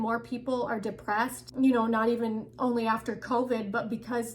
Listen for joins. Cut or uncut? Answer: cut